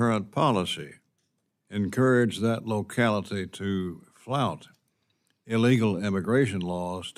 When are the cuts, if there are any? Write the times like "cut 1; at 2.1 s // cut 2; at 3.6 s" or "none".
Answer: none